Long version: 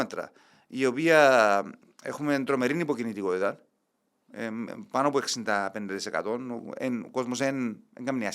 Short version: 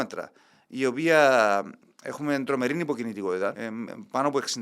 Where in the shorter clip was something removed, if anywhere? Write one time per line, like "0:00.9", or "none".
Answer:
0:03.6